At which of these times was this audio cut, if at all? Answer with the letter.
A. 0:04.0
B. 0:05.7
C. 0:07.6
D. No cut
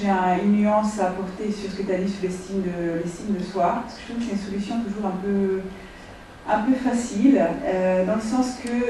D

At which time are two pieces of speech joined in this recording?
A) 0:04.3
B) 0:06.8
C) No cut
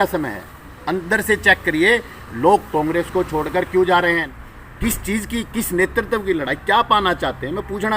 A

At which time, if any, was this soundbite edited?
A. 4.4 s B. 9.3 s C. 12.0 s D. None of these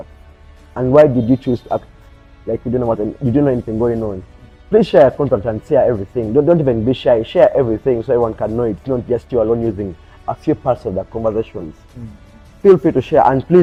D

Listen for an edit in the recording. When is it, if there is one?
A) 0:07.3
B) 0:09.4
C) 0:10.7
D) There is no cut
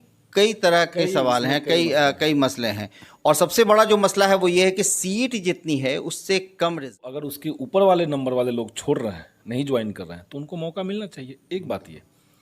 A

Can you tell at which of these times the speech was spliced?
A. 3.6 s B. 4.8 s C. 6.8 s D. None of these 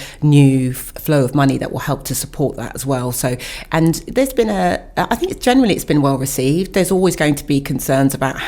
D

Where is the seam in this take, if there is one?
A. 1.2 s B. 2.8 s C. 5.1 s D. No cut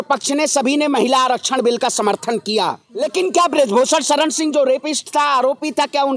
B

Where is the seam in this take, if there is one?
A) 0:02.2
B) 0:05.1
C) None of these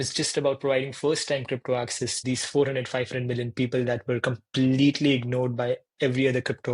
A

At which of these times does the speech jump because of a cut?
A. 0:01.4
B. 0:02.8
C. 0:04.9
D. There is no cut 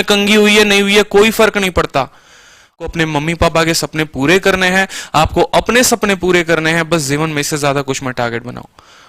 B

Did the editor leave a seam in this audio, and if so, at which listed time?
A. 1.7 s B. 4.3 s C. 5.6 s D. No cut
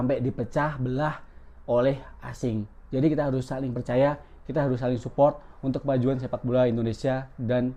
D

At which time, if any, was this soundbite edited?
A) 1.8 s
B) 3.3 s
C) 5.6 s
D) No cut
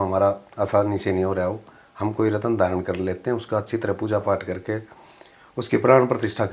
D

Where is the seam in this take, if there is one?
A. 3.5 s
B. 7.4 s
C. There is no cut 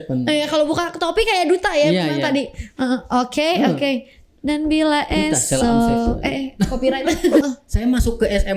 B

